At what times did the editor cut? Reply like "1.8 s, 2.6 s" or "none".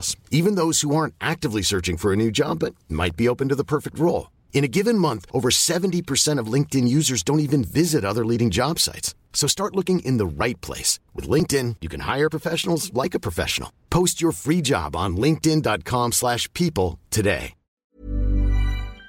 17.8 s